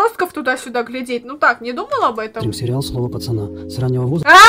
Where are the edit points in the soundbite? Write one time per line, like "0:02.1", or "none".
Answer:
none